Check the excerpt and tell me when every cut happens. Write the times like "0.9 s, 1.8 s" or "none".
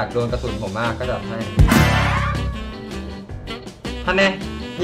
none